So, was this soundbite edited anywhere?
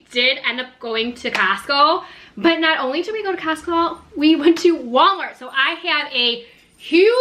no; 0 cuts

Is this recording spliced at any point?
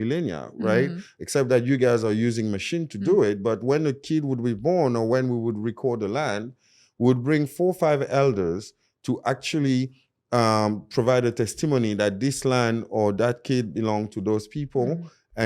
no; 0 cuts

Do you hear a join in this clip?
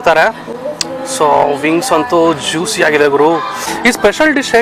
yes; 1 cut; at 3.7 s

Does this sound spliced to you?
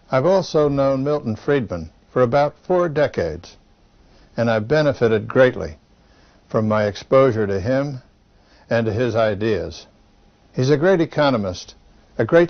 no; 0 cuts

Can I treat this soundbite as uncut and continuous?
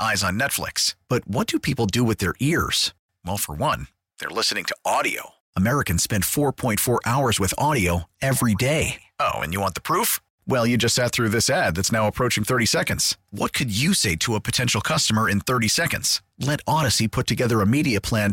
yes; 0 cuts

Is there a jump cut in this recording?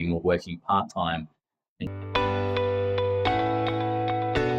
yes; 1 cut; at 1.7 s

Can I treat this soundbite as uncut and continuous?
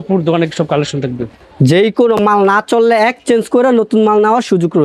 no; 1 cut; at 1.4 s

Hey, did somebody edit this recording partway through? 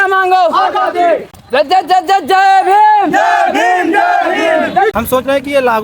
yes; 2 cuts; at 1.3 s, 4.9 s

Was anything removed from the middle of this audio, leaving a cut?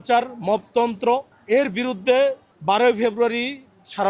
yes; 2 cuts; at 1.3 s, 2.5 s

